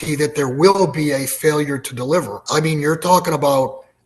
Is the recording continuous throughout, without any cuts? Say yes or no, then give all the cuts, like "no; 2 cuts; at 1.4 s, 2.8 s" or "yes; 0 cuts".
no; 1 cut; at 2.4 s